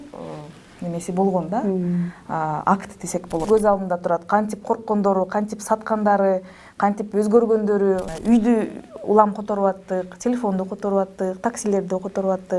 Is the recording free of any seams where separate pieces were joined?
no; 2 cuts; at 3.4 s, 8.1 s

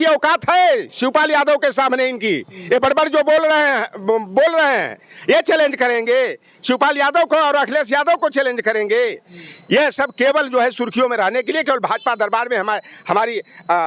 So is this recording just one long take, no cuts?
yes; 0 cuts

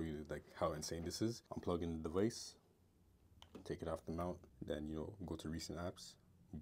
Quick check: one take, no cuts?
no; 2 cuts; at 1.5 s, 4.5 s

